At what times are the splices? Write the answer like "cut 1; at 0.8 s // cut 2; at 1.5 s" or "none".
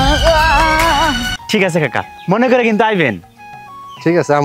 cut 1; at 1.3 s